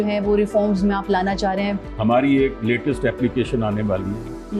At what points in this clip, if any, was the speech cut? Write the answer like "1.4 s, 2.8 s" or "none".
1.9 s